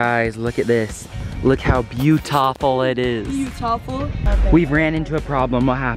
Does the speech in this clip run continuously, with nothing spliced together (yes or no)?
no